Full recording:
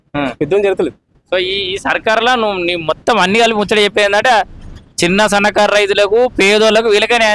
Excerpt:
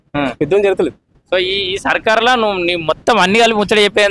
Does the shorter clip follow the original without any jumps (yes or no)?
yes